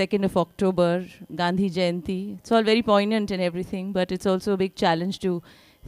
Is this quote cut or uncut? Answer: cut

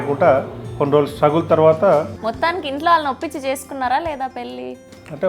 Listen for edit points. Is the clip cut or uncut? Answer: cut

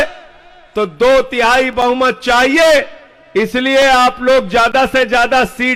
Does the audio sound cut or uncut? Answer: uncut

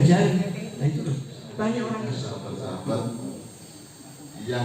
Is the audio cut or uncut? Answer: cut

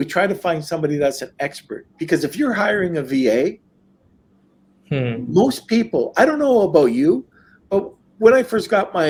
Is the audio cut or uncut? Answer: uncut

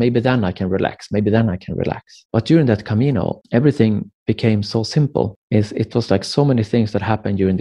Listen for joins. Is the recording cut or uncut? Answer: cut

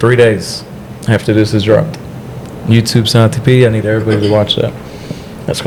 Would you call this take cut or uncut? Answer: uncut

